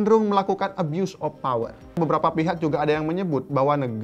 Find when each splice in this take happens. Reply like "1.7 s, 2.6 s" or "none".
2.0 s